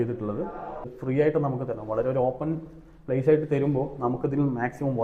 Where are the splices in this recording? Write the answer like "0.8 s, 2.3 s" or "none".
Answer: 0.9 s